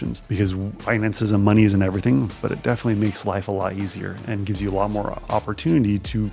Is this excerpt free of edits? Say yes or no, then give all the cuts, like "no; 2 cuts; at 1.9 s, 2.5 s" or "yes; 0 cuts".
yes; 0 cuts